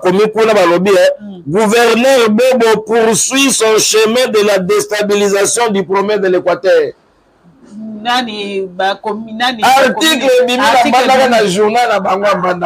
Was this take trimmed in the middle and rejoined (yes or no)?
no